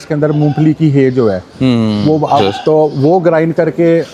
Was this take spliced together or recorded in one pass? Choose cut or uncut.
cut